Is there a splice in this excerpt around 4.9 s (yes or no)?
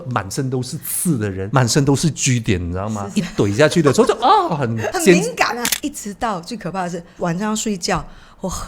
yes